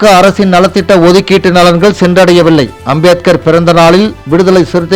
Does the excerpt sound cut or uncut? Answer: uncut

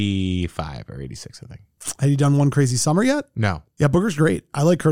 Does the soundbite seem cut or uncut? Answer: cut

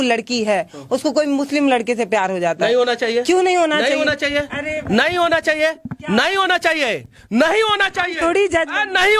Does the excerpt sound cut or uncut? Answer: uncut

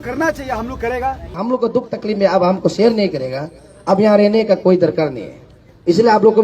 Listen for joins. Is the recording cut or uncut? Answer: cut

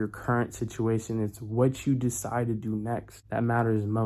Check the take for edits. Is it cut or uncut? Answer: cut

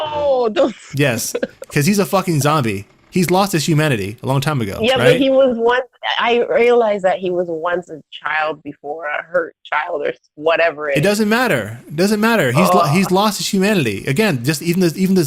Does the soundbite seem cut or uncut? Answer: uncut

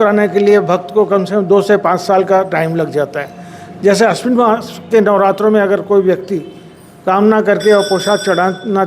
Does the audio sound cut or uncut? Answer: uncut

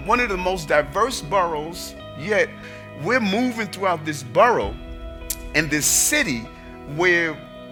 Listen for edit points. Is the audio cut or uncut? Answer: uncut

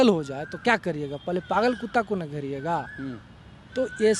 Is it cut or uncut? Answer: uncut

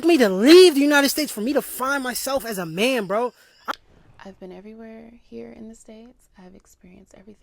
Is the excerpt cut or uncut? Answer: cut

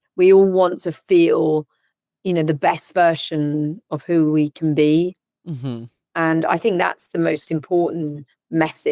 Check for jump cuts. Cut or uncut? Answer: cut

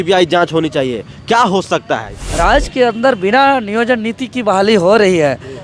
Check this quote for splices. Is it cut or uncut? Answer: cut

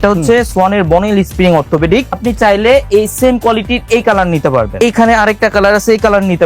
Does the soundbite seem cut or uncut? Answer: cut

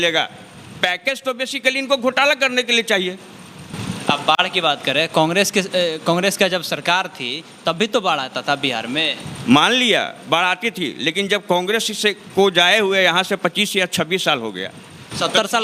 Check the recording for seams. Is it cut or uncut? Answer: uncut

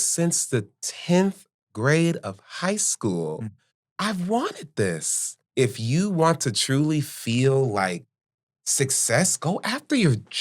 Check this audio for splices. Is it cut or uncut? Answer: cut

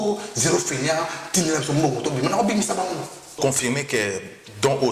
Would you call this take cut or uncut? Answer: cut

